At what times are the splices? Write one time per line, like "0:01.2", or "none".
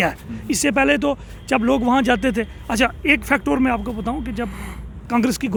none